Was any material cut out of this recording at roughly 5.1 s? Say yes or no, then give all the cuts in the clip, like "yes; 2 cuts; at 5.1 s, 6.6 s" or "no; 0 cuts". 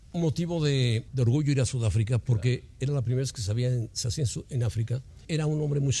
yes; 2 cuts; at 1.1 s, 5.1 s